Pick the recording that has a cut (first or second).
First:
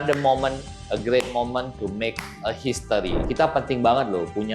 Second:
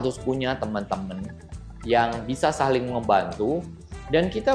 first